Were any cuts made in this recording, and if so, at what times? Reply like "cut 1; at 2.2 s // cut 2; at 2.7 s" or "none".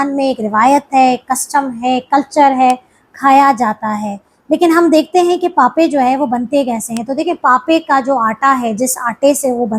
none